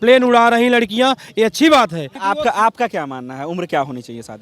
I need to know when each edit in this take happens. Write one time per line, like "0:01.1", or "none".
0:02.1

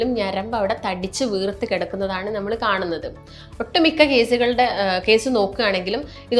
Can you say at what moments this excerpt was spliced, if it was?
none

